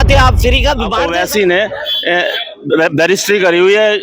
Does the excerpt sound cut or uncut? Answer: cut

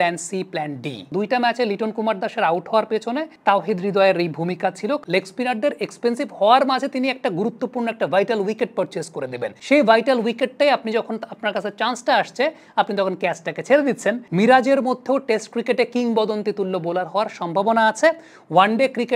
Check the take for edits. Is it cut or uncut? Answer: cut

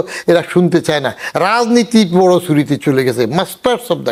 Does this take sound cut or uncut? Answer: uncut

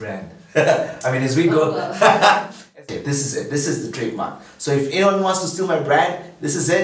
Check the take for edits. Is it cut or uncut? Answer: cut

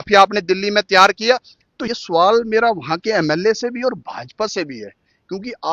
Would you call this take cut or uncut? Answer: cut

